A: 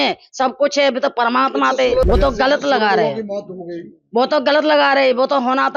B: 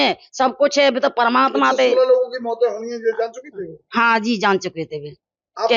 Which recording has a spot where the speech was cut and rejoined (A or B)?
A